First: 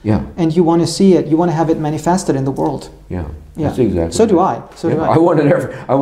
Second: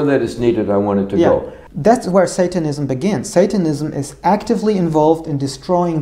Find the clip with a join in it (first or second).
second